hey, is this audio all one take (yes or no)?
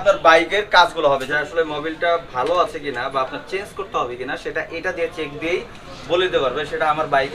no